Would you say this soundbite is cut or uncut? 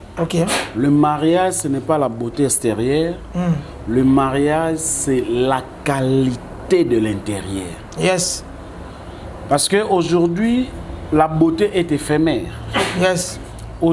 uncut